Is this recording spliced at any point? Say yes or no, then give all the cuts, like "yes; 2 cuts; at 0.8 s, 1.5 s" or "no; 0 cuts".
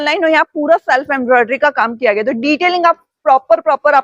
no; 0 cuts